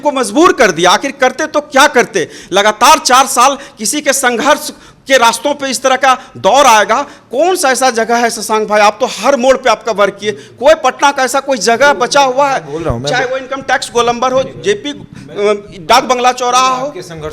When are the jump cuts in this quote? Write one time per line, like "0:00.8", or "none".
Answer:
none